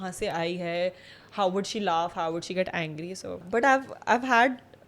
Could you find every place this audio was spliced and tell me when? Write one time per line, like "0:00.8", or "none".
0:03.4

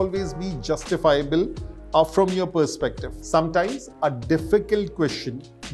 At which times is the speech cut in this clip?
0:03.1

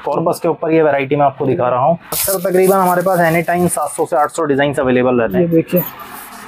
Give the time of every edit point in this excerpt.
0:02.1

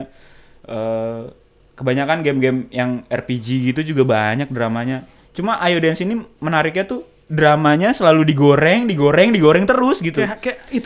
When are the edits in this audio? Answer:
none

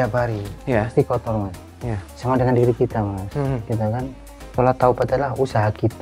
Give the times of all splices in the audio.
none

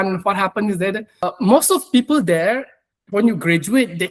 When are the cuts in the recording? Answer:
0:01.2

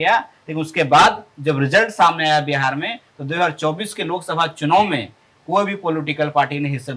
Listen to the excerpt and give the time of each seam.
none

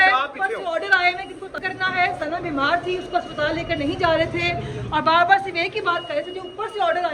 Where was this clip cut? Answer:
0:01.6

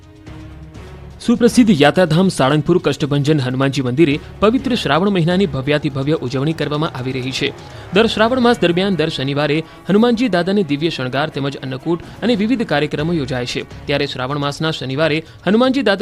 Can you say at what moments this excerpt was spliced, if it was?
0:13.7

